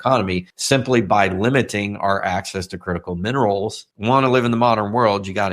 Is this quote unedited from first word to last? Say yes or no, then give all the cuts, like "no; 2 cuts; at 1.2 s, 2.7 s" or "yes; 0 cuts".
no; 1 cut; at 3.9 s